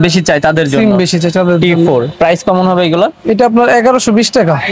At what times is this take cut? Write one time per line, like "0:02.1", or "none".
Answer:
none